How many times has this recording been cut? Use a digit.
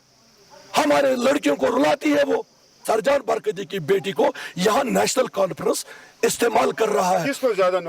1